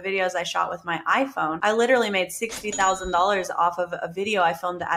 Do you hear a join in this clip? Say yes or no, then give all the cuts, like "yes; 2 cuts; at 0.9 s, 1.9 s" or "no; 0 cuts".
yes; 1 cut; at 1.6 s